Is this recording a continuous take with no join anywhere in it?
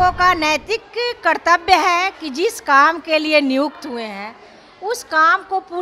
yes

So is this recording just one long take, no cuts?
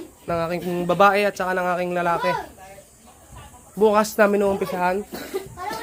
yes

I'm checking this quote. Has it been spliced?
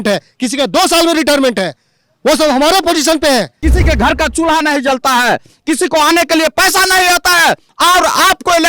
yes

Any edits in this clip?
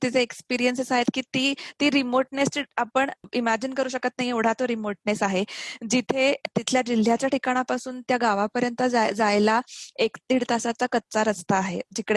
no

